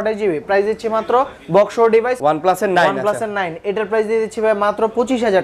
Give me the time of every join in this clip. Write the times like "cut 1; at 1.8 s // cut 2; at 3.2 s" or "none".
cut 1; at 2.2 s